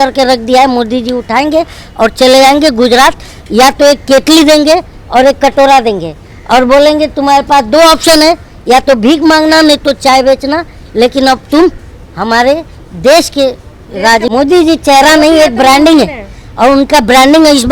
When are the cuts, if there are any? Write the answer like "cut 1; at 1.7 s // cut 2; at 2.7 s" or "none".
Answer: cut 1; at 14.3 s